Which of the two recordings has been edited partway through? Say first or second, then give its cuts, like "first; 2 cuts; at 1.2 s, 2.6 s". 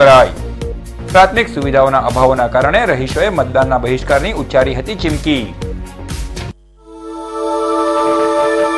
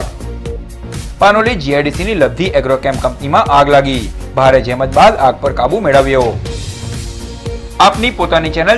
first; 1 cut; at 6.7 s